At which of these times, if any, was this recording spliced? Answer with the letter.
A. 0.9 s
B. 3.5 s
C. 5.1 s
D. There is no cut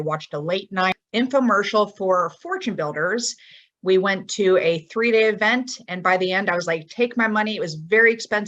A